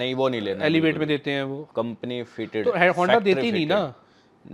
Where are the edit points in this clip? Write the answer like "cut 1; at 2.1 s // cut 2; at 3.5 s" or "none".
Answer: cut 1; at 1.6 s

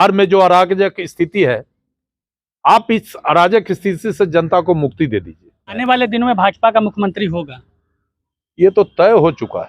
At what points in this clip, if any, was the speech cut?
cut 1; at 5.8 s

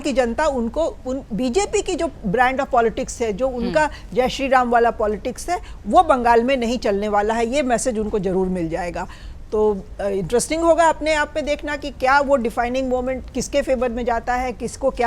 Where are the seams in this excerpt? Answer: none

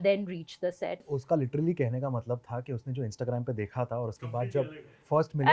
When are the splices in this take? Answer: cut 1; at 1.1 s

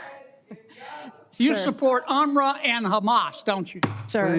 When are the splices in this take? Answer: none

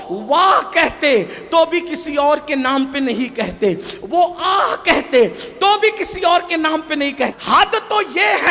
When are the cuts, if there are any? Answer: cut 1; at 7.3 s

